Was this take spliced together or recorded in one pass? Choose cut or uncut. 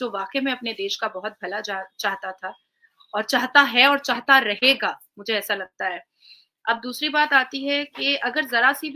uncut